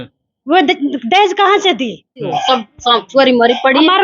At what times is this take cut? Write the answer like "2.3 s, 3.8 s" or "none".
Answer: 2.3 s